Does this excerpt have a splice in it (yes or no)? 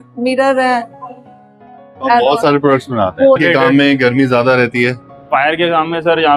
yes